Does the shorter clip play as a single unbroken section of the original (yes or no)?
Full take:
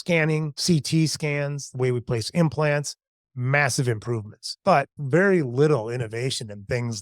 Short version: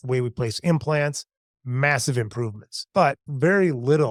yes